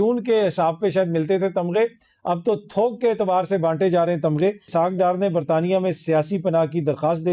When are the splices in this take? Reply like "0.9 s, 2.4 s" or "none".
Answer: 4.7 s